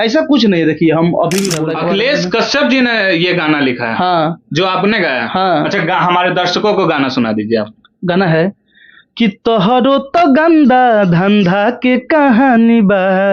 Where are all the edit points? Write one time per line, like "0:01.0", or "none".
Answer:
0:01.6